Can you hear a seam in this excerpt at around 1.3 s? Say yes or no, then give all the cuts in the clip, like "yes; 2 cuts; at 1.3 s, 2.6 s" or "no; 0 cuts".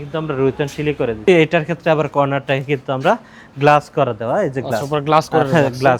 yes; 1 cut; at 1.3 s